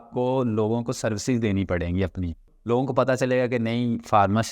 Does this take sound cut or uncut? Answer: cut